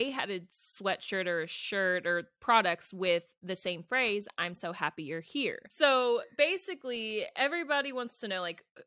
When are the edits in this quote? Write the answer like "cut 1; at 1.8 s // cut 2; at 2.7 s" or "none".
cut 1; at 5.7 s